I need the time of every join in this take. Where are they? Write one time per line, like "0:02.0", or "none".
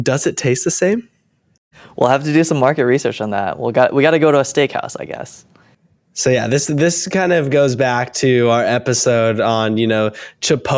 none